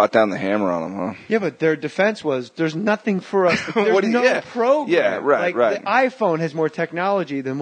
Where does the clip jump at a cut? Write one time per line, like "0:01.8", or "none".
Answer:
0:04.3